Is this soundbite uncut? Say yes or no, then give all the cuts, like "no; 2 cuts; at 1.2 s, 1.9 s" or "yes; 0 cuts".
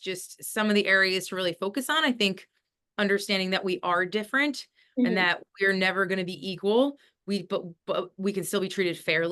yes; 0 cuts